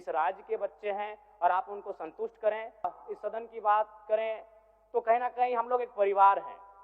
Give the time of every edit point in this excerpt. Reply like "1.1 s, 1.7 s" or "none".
2.9 s